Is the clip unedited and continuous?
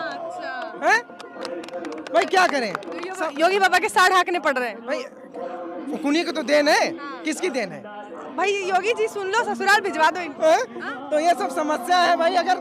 no; 1 cut; at 8.2 s

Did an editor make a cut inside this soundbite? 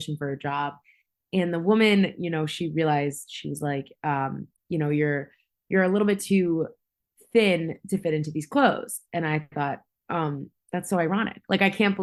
no; 0 cuts

